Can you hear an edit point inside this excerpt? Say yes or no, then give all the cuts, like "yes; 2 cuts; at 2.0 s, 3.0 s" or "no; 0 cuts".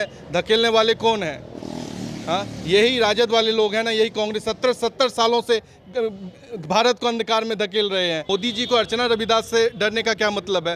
yes; 1 cut; at 8.3 s